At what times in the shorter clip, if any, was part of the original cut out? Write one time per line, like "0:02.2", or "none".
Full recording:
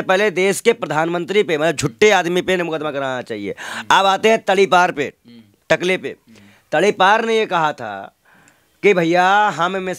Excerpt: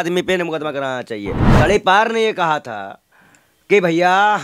0:01.4